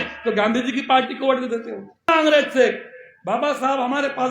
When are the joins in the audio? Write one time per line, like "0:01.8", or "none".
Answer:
0:02.1